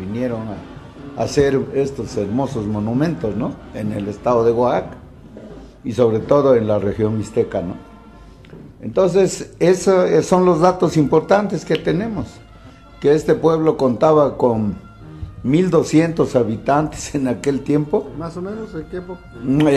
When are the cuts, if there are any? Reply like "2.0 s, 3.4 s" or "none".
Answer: 11.4 s